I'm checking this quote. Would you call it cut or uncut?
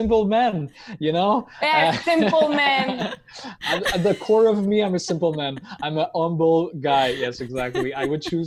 uncut